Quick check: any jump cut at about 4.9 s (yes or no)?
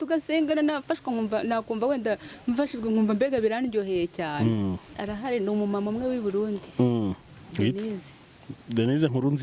yes